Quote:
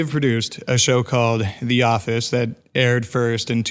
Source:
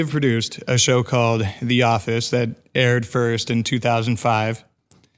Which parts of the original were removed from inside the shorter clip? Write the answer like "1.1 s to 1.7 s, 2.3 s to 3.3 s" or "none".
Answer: none